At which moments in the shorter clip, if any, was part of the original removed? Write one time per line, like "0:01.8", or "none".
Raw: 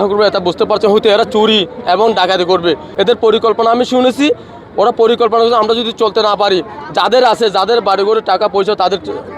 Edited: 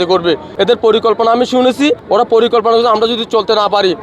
0:02.0